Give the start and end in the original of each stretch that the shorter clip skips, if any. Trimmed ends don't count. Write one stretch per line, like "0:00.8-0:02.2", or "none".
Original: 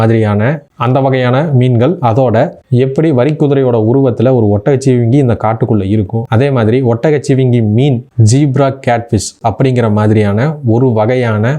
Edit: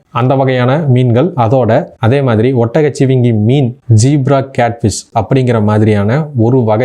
0:02.6-0:06.2